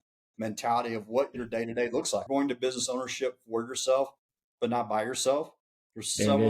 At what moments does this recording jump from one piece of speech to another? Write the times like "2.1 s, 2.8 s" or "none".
2.3 s

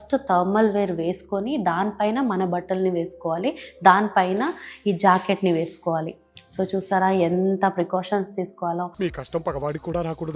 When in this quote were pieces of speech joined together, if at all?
none

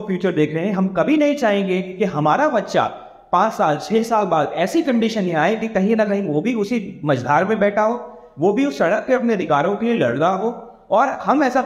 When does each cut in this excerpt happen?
none

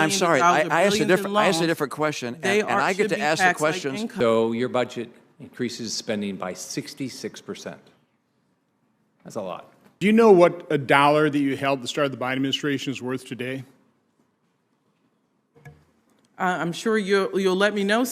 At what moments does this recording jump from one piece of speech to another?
4.1 s, 9.9 s

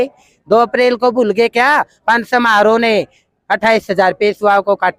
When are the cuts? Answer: none

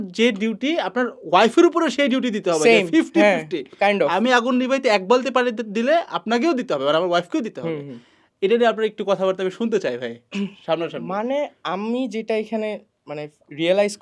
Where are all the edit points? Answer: none

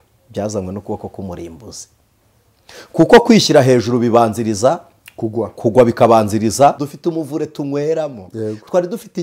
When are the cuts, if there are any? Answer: 6.8 s

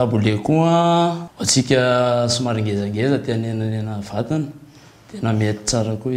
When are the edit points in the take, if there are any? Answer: 1.3 s

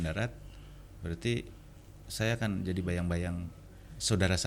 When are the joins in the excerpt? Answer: none

